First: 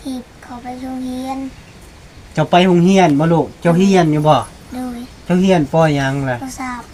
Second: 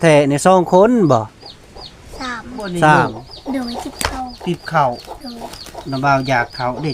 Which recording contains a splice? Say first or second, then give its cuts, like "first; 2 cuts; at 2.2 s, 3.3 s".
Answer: second; 1 cut; at 3.3 s